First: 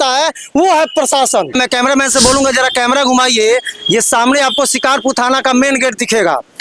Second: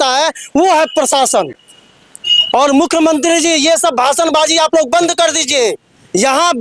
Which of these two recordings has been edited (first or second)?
first